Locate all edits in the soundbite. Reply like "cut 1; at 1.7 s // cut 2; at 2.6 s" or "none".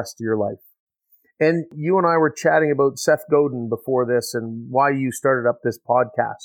cut 1; at 1.7 s